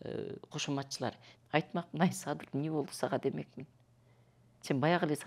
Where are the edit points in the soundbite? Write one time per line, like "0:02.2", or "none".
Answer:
0:01.3